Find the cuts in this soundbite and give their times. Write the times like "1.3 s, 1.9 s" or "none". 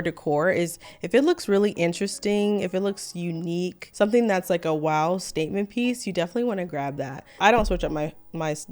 3.8 s, 7.2 s